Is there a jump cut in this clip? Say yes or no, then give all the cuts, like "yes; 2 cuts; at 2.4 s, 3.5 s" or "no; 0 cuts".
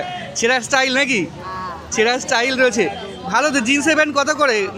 no; 0 cuts